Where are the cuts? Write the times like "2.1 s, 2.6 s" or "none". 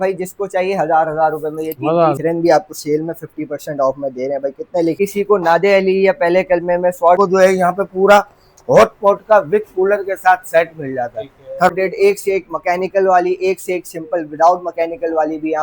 2.2 s, 5.0 s, 7.2 s, 11.7 s